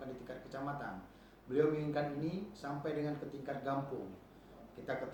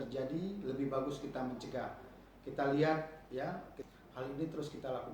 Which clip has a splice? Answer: second; 1 cut; at 3.7 s

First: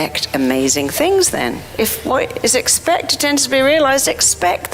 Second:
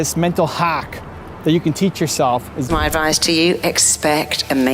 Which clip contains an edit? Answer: second; 1 cut; at 2.7 s

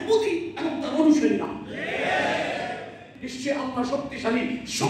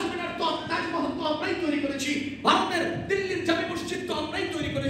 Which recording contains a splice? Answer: first; 1 cut; at 3.2 s

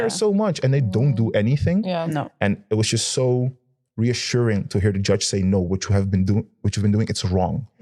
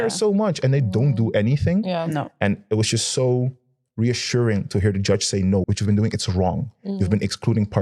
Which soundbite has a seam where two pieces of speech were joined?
second; 1 cut; at 5.6 s

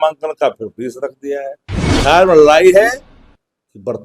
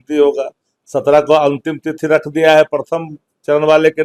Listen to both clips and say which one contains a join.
first; 1 cut; at 1.7 s

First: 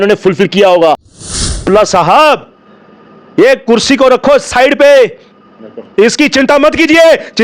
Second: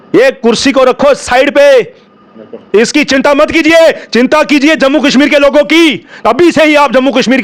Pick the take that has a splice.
first; 1 cut; at 1.5 s

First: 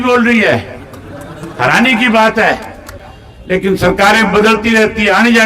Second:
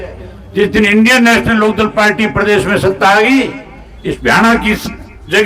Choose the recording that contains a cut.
first; 1 cut; at 2.9 s

